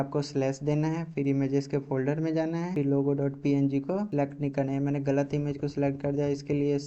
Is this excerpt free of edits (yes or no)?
yes